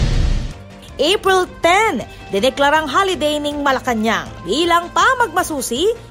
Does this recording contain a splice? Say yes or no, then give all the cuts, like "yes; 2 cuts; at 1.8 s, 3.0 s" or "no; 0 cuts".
yes; 1 cut; at 0.9 s